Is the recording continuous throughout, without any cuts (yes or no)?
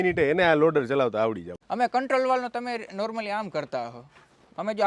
no